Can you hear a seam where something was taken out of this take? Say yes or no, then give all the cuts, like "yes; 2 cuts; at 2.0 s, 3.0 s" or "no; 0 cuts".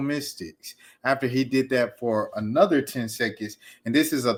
no; 0 cuts